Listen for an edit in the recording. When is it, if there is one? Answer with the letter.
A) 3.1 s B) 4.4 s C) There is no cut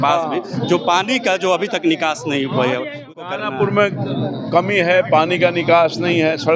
A